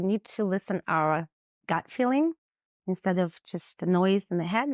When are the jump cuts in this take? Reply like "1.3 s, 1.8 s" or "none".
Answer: none